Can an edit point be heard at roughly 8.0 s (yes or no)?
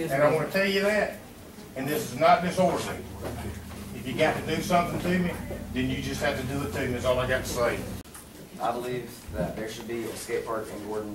yes